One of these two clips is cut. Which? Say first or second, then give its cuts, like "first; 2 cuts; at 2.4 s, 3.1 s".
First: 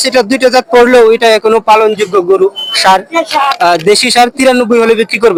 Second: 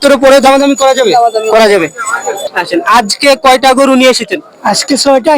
second; 1 cut; at 2.4 s